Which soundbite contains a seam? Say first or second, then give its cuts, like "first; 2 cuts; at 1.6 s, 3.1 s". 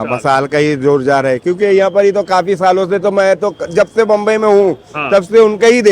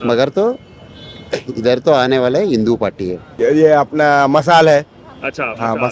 second; 1 cut; at 3.3 s